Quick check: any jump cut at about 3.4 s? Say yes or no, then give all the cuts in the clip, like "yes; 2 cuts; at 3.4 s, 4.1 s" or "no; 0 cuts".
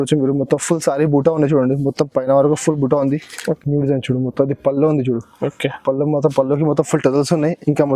yes; 1 cut; at 3.4 s